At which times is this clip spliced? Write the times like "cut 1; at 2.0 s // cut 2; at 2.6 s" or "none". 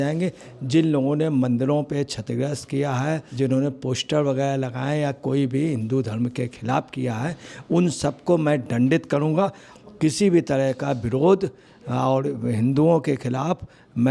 cut 1; at 3.3 s // cut 2; at 9.7 s